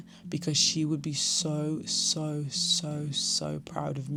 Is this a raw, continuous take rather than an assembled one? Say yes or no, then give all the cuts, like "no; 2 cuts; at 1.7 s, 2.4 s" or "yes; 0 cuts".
yes; 0 cuts